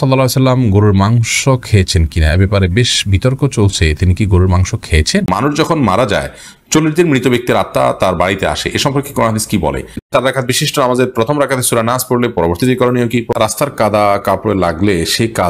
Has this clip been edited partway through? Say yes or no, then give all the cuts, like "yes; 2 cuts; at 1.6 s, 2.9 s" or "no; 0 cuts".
yes; 3 cuts; at 5.3 s, 10.1 s, 13.3 s